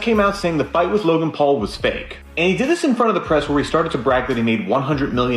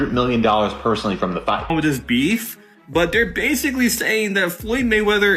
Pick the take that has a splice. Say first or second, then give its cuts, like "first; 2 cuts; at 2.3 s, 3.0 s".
second; 1 cut; at 1.7 s